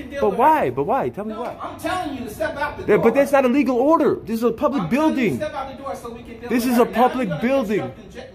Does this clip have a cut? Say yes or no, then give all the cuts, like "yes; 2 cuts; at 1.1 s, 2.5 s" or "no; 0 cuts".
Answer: yes; 2 cuts; at 1.4 s, 7.3 s